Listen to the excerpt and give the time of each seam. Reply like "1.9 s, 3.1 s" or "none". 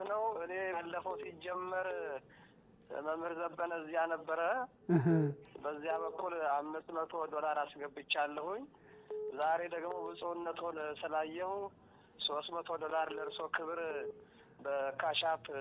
none